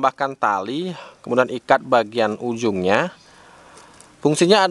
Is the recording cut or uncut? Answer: uncut